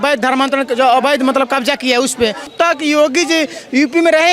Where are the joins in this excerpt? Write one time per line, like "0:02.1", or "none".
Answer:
0:02.5